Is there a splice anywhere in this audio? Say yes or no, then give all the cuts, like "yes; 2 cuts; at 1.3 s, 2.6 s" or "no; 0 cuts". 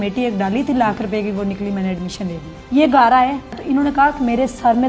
yes; 2 cuts; at 2.5 s, 3.6 s